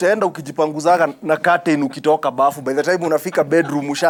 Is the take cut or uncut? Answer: uncut